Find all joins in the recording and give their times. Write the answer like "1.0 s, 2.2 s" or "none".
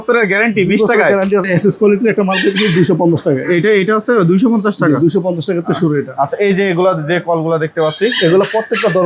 1.5 s